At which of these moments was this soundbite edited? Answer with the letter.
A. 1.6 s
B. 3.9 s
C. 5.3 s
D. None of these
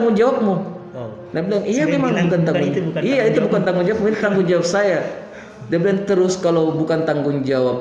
D